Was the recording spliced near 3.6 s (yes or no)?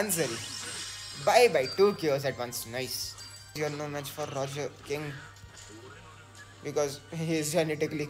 yes